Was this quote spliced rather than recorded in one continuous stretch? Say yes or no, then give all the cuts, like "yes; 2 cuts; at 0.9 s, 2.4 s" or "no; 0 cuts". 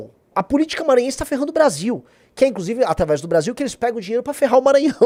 no; 0 cuts